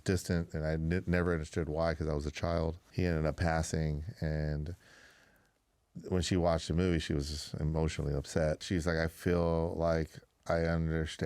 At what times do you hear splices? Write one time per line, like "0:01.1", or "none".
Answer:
0:02.8
0:08.6